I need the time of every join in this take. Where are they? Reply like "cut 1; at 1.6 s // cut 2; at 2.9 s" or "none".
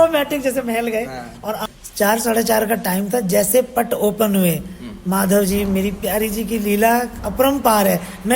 cut 1; at 1.6 s